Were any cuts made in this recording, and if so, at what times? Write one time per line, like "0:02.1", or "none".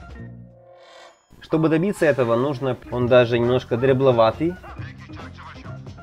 0:02.7